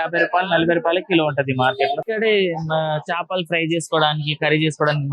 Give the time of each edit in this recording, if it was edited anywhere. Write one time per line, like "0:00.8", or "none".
0:02.0